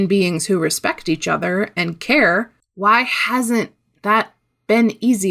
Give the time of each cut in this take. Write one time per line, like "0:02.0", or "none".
0:02.6